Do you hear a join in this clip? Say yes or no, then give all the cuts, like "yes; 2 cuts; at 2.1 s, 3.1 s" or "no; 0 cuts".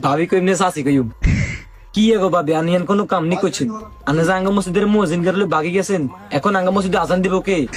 no; 0 cuts